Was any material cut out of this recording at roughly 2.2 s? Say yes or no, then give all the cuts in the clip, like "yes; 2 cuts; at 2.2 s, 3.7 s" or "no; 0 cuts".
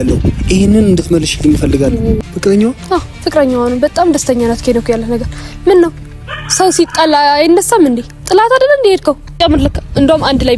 yes; 2 cuts; at 2.2 s, 9.4 s